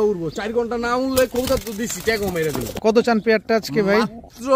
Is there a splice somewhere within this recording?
yes; 1 cut; at 2.7 s

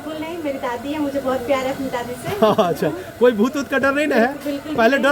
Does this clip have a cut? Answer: no; 0 cuts

